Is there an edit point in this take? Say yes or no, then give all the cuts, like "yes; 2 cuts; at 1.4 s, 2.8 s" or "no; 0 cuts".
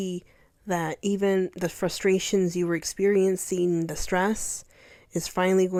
no; 0 cuts